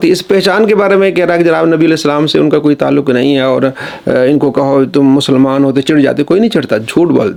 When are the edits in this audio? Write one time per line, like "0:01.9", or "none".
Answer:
none